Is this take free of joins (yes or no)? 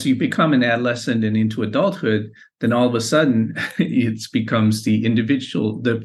yes